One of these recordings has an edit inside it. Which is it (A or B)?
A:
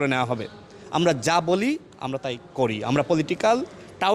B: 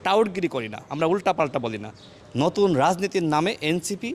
B